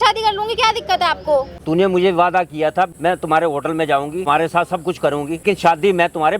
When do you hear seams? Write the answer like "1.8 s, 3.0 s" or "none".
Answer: 1.5 s, 2.9 s, 4.3 s, 5.4 s